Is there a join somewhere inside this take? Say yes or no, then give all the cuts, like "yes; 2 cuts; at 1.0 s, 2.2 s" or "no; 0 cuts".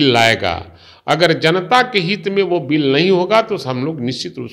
no; 0 cuts